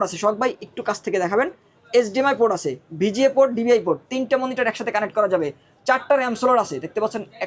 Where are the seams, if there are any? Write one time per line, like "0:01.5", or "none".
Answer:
none